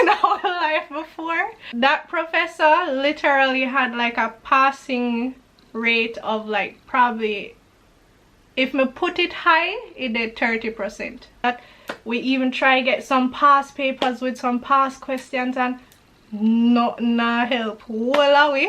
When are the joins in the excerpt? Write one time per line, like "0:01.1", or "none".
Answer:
0:01.6
0:11.4